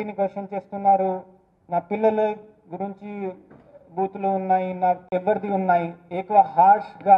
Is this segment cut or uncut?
cut